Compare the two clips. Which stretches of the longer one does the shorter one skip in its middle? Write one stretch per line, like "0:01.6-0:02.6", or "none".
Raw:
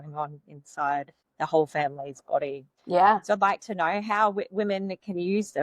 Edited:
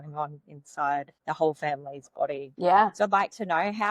0:01.1-0:01.3
0:02.6-0:02.7